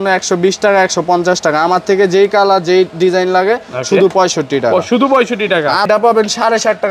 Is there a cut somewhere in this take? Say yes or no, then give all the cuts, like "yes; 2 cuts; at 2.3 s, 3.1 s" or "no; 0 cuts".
yes; 1 cut; at 5.9 s